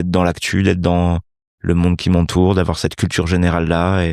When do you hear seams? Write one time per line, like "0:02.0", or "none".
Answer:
none